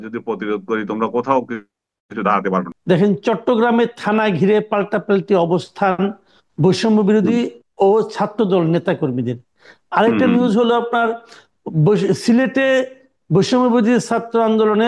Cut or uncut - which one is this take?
cut